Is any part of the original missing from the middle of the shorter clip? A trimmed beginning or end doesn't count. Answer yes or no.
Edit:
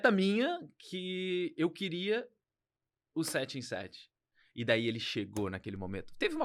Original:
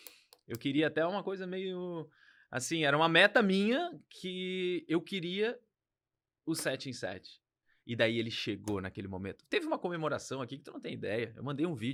no